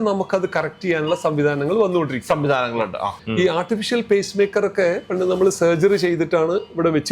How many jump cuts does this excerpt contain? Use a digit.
1